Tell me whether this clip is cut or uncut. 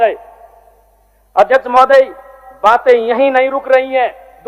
uncut